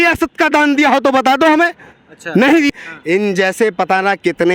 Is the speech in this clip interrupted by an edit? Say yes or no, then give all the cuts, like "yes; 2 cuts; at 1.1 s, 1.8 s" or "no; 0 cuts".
yes; 1 cut; at 2.7 s